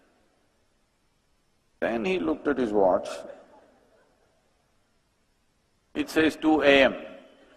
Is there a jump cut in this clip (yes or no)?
yes